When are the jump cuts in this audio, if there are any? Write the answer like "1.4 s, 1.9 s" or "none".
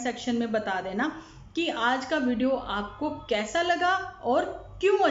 none